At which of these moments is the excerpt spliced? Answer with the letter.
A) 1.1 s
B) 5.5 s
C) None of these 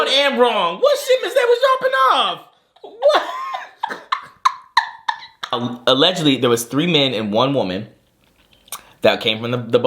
B